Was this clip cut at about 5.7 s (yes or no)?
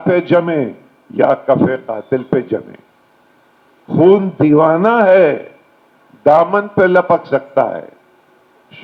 no